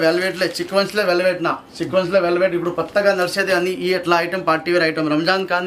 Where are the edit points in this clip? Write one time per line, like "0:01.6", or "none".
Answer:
none